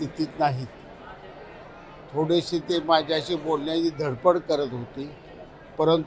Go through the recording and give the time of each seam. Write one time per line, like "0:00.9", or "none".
none